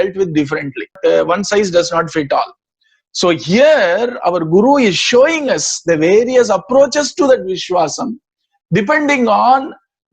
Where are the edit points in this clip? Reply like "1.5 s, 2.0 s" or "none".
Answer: 1.0 s